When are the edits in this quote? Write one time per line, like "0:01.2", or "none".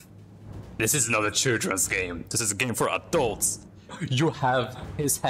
0:04.0